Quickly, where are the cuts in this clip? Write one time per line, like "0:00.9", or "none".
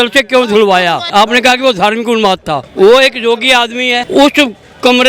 0:01.1
0:02.6
0:04.0